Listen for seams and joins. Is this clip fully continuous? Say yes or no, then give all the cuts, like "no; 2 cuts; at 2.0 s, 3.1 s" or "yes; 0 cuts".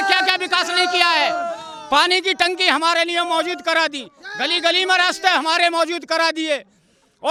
yes; 0 cuts